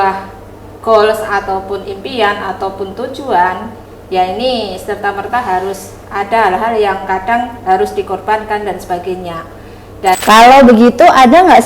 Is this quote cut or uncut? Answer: cut